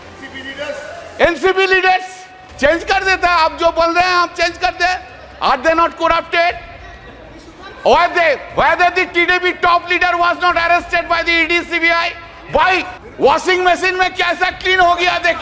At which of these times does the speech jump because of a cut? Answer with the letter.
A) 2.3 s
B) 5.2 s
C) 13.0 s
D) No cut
C